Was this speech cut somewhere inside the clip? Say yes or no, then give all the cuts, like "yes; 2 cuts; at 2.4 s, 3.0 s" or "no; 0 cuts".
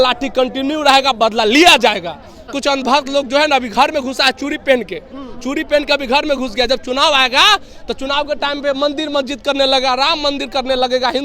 yes; 1 cut; at 2.6 s